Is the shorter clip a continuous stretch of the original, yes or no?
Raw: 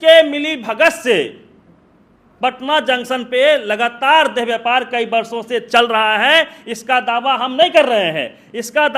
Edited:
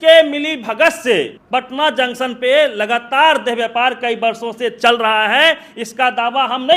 no